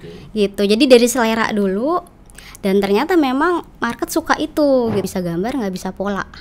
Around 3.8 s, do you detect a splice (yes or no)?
no